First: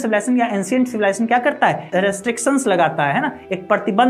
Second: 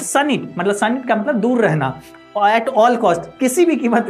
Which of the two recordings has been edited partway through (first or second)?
first